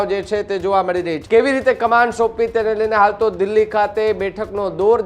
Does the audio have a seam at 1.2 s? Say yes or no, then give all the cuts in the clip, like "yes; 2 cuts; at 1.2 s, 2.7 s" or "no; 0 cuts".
yes; 1 cut; at 1.2 s